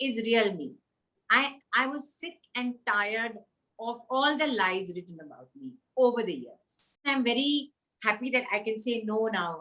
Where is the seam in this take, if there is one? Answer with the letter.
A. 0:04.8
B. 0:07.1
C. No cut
B